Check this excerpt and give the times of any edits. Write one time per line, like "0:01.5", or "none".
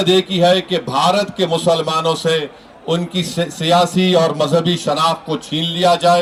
none